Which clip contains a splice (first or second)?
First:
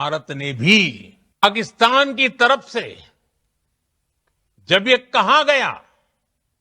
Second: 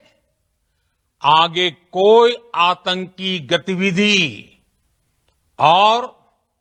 first